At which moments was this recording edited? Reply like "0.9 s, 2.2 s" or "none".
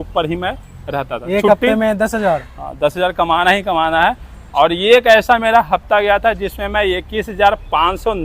4.4 s